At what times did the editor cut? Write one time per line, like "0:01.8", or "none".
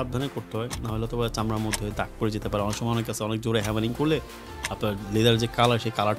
none